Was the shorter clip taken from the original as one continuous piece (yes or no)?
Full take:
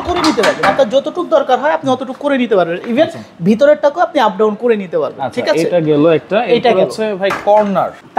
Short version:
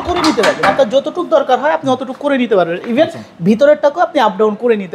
yes